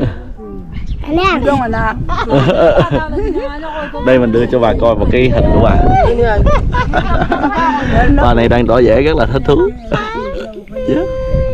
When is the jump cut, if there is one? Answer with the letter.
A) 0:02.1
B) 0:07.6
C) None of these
C